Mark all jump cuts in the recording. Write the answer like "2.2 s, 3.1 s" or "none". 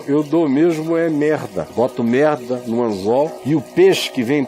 1.7 s, 3.4 s